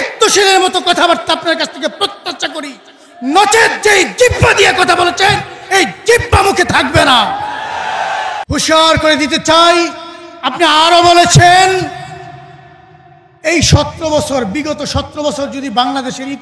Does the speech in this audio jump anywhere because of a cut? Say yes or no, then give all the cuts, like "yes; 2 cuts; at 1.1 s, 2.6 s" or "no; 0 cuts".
yes; 1 cut; at 8.4 s